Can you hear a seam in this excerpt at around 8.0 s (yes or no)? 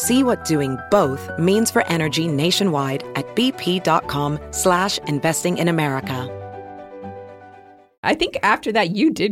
yes